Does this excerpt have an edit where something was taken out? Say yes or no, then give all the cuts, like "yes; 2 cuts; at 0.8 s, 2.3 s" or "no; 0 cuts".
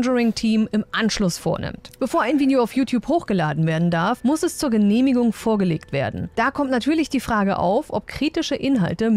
no; 0 cuts